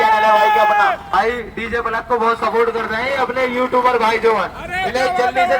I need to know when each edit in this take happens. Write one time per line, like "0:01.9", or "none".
0:01.1